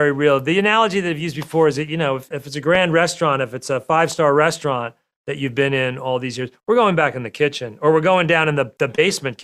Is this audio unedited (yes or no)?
no